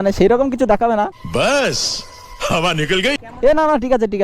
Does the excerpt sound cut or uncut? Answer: uncut